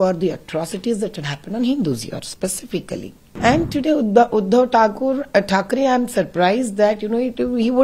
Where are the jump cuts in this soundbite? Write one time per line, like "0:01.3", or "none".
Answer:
0:03.2